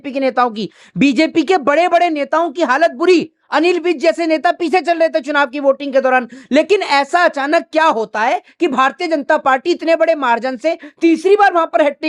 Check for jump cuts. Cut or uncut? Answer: uncut